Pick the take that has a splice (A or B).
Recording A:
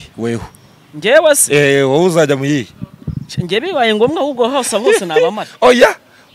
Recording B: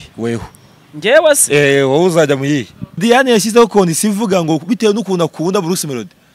B